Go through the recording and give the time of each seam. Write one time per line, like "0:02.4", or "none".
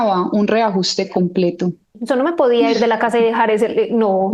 0:01.9